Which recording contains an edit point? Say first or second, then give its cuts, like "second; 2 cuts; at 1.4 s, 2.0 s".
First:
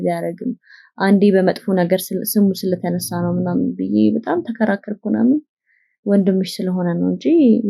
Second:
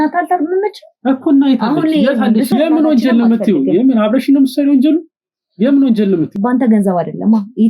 second; 2 cuts; at 2.5 s, 6.3 s